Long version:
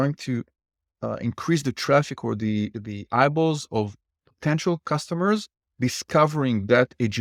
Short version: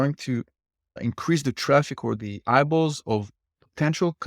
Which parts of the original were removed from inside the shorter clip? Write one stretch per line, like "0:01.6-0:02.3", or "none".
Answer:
0:01.0-0:01.2
0:02.4-0:02.8